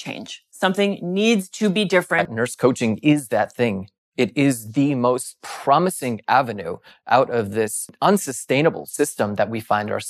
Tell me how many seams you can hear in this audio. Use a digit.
2